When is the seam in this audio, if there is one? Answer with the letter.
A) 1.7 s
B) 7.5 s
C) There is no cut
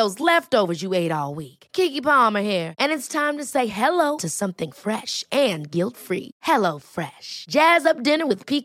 C